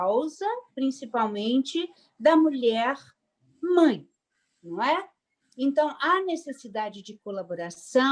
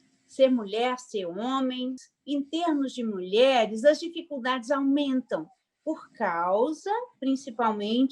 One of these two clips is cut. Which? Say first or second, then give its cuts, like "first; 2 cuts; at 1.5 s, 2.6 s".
second; 1 cut; at 2.0 s